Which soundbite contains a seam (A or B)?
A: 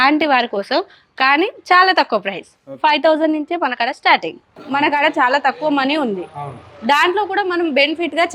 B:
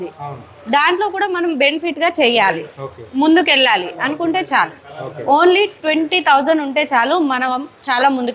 A